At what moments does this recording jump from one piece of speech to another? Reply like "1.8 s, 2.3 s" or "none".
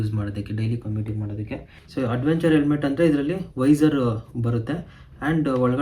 1.7 s